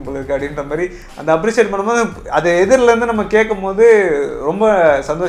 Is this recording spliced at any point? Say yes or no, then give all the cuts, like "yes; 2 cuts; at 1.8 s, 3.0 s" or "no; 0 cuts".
no; 0 cuts